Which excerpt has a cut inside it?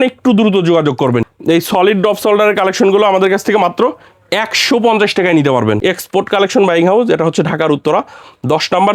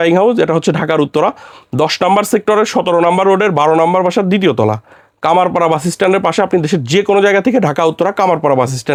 first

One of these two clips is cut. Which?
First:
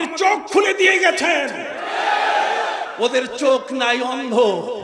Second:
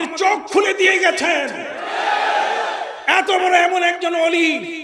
first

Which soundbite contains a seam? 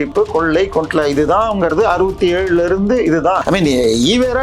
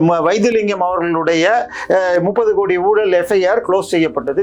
first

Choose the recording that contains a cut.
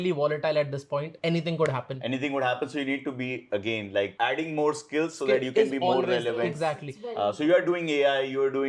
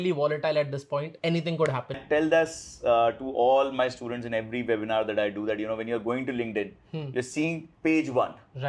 second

